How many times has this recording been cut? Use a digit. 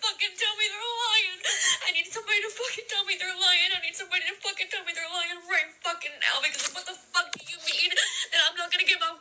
0